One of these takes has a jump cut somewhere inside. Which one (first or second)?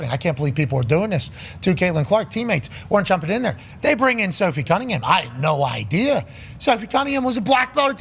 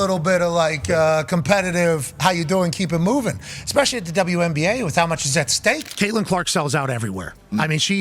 second